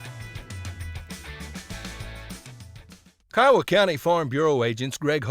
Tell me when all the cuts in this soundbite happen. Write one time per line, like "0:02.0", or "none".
0:03.3